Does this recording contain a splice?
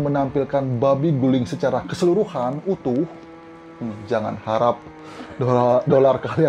no; 0 cuts

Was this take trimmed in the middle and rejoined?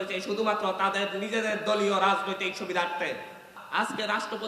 yes; 1 cut; at 3.6 s

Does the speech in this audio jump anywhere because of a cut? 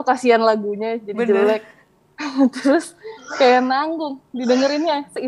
no; 0 cuts

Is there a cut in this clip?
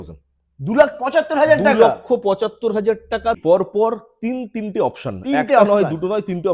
yes; 1 cut; at 3.4 s

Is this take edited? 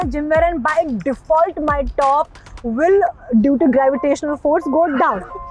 no; 0 cuts

